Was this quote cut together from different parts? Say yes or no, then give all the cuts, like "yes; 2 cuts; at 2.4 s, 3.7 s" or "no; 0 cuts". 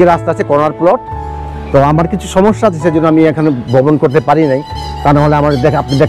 no; 0 cuts